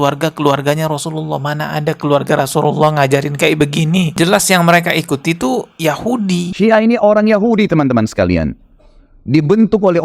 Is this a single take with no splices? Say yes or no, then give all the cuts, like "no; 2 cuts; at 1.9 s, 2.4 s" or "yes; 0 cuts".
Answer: no; 1 cut; at 6.5 s